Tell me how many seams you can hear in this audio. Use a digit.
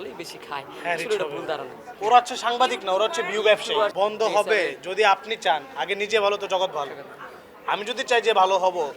2